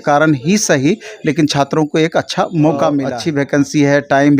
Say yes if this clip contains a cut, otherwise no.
yes